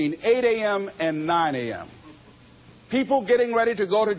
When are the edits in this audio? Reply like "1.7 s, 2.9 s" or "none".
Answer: none